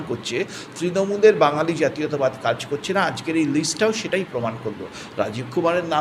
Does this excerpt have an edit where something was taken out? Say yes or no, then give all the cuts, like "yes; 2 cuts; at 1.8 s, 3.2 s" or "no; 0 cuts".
no; 0 cuts